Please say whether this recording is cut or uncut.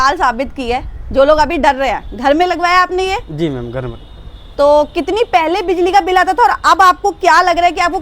uncut